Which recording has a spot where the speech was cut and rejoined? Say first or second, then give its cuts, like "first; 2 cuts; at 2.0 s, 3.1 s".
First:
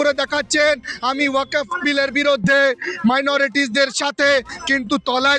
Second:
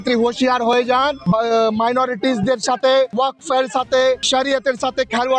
second; 3 cuts; at 1.2 s, 3.1 s, 4.2 s